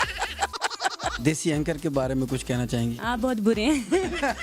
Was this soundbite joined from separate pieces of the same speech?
yes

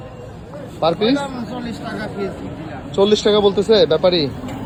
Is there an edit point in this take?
no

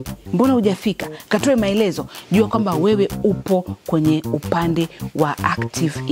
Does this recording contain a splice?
no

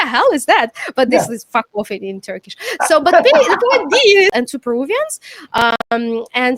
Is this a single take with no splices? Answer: no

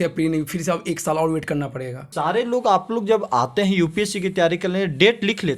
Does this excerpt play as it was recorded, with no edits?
no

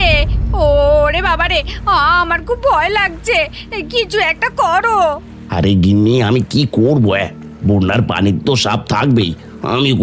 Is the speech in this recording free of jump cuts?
yes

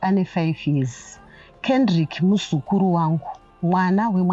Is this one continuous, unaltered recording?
yes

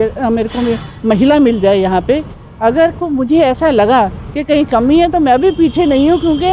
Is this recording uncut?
yes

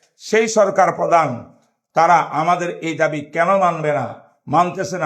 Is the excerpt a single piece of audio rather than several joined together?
yes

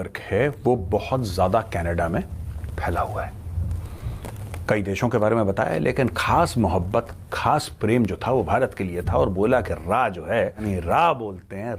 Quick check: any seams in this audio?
yes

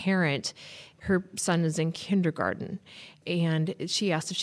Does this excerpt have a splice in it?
yes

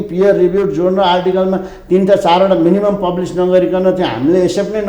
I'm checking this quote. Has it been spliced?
no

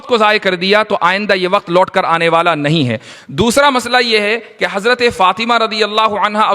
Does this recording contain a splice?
yes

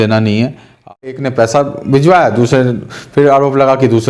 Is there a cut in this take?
yes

